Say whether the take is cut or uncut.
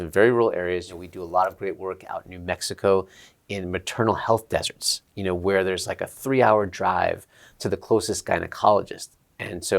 cut